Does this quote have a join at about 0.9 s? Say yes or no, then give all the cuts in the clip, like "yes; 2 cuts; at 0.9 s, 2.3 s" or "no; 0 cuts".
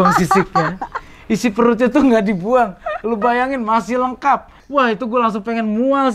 no; 1 cut; at 4.6 s